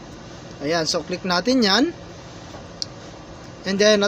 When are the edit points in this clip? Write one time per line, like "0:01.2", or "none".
0:03.0